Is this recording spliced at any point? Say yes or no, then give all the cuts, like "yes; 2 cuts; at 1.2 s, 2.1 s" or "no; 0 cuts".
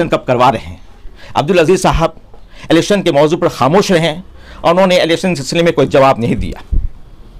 no; 0 cuts